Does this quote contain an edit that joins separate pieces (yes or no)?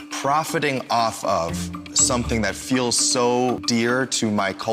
yes